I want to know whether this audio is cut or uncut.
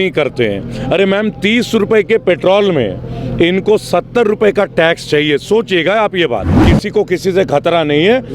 cut